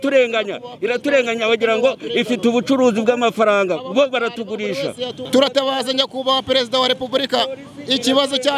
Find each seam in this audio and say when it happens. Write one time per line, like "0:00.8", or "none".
0:05.1